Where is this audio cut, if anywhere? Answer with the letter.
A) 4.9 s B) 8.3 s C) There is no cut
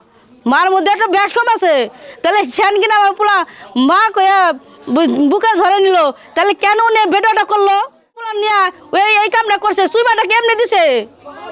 B